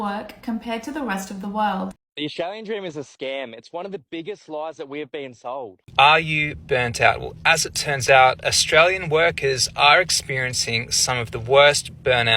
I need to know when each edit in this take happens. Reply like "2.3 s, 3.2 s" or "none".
2.0 s, 5.8 s